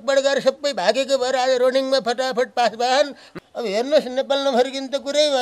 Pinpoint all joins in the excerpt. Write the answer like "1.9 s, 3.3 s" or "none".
3.3 s